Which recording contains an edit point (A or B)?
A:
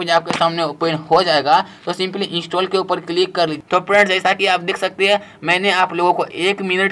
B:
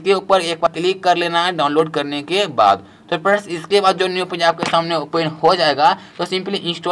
A